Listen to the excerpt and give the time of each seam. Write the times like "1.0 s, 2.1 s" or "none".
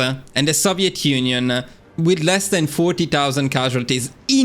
none